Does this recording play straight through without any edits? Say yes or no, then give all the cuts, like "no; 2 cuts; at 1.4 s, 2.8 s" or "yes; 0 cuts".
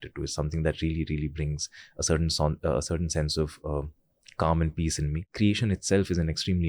no; 1 cut; at 5.2 s